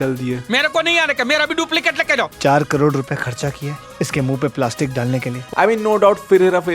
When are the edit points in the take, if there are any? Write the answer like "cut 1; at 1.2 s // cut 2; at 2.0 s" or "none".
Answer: cut 1; at 2.3 s // cut 2; at 5.4 s